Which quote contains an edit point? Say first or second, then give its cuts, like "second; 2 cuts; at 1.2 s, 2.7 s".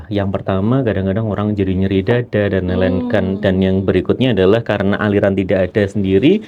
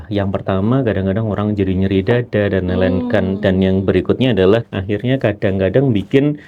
second; 1 cut; at 4.7 s